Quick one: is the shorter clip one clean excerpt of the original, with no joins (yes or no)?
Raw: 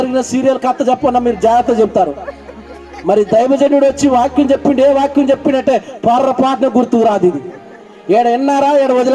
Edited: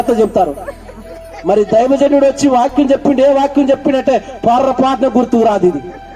yes